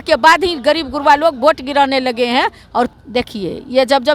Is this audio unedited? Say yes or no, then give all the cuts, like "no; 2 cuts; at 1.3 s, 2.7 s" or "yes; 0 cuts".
no; 1 cut; at 2.9 s